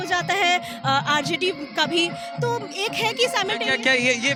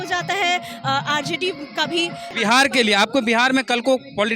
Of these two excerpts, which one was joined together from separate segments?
second; 1 cut; at 2.3 s

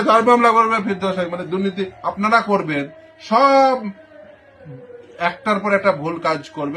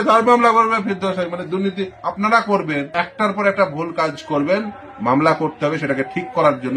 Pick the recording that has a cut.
second; 1 cut; at 2.9 s

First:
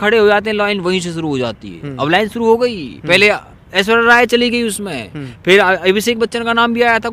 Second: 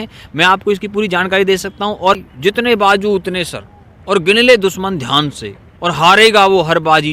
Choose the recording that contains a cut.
second; 1 cut; at 2.2 s

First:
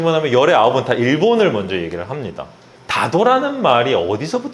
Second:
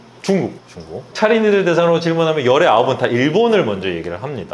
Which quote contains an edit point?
second; 1 cut; at 1.0 s

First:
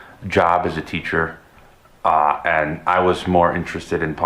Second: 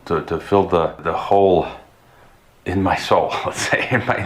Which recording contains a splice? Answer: second; 1 cut; at 1.0 s

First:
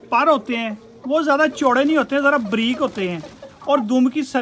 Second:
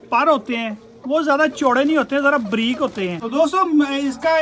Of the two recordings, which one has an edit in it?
second; 1 cut; at 3.2 s

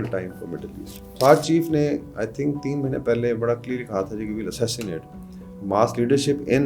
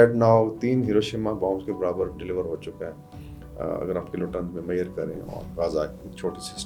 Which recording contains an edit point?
first; 1 cut; at 1.1 s

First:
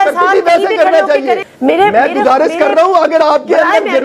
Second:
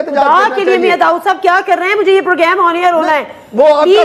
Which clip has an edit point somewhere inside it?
first; 1 cut; at 1.5 s

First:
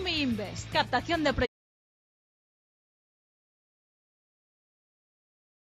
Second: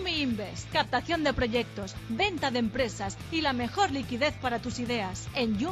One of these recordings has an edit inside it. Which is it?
second; 1 cut; at 1.5 s

